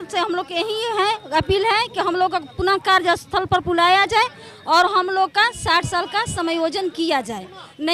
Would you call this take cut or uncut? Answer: uncut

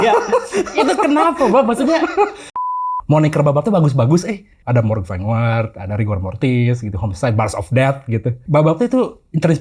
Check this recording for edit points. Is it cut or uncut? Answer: cut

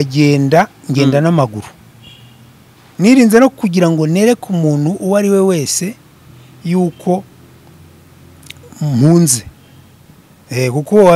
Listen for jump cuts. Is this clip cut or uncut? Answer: uncut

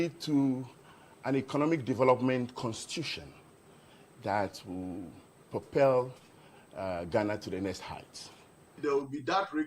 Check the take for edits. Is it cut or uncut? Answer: cut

